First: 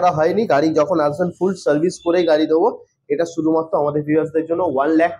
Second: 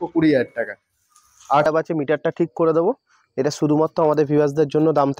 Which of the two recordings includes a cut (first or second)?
second